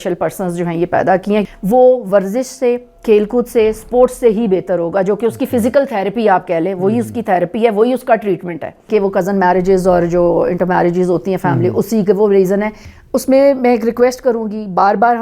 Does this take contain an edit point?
yes; 3 cuts; at 1.4 s, 8.8 s, 12.8 s

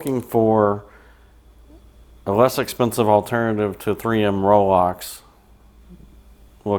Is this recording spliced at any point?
no; 0 cuts

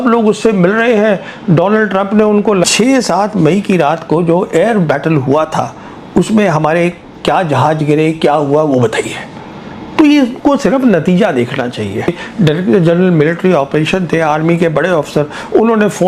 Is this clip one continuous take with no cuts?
no; 2 cuts; at 2.6 s, 12.1 s

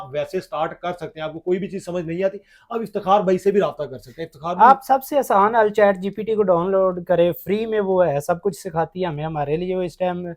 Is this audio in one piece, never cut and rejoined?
yes; 0 cuts

